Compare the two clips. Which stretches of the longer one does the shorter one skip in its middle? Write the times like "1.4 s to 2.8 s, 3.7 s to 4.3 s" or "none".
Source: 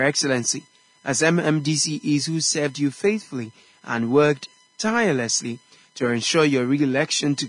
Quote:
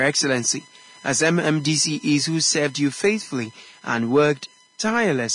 none

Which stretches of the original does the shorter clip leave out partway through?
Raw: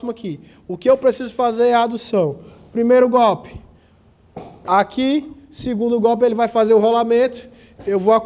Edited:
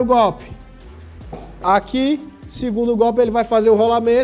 none

